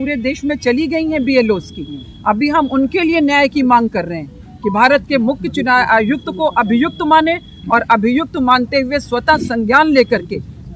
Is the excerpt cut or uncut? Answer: uncut